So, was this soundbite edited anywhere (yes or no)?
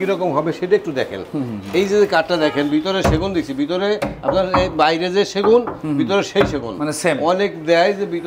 no